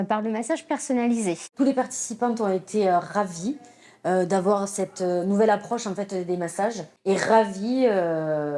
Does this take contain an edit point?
yes; 2 cuts; at 1.5 s, 6.9 s

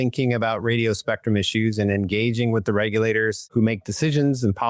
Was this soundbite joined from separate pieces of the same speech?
yes; 1 cut; at 3.5 s

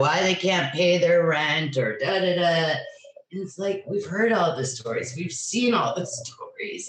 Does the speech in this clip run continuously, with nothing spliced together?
yes; 0 cuts

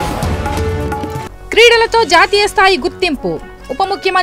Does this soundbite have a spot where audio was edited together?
yes; 1 cut; at 1.1 s

